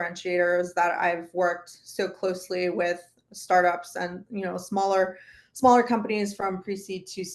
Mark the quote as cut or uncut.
uncut